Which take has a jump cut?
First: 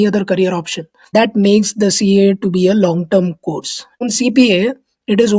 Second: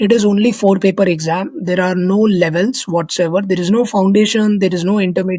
first; 2 cuts; at 1.1 s, 4.0 s

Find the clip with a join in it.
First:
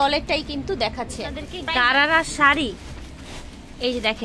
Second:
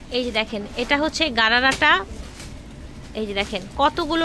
first; 1 cut; at 1.5 s

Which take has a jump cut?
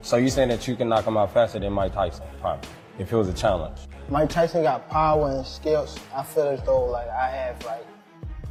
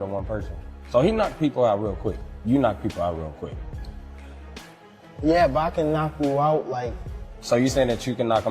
second; 2 cuts; at 3.6 s, 5.2 s

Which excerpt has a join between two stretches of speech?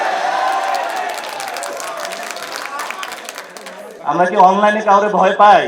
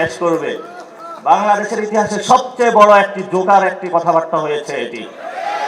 first; 1 cut; at 4.0 s

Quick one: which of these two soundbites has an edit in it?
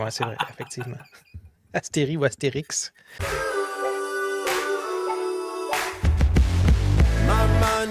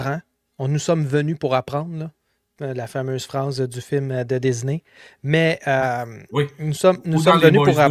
first; 1 cut; at 3.2 s

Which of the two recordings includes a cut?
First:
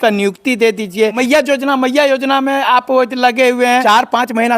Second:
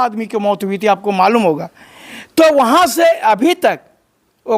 first; 2 cuts; at 1.2 s, 3.8 s

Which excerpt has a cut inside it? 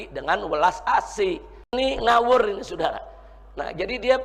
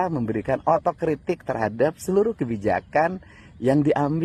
first; 1 cut; at 1.7 s

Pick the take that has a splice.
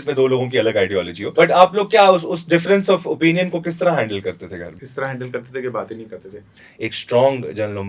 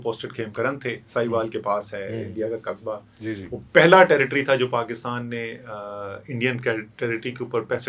first; 3 cuts; at 1.2 s, 4.8 s, 6.7 s

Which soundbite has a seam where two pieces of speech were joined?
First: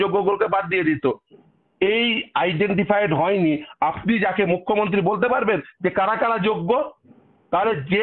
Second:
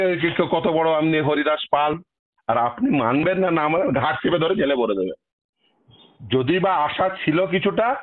second; 1 cut; at 4.9 s

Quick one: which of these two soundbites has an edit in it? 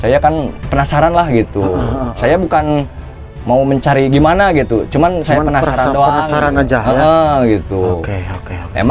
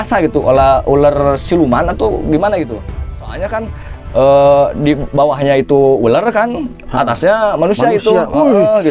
second; 1 cut; at 3.1 s

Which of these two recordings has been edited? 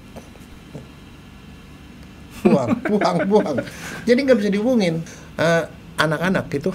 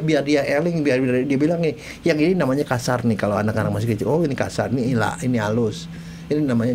first; 1 cut; at 5.1 s

